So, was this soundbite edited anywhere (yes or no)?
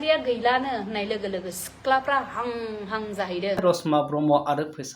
yes